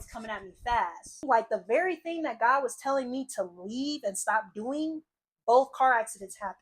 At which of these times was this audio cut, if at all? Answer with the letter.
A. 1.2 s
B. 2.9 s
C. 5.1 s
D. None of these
A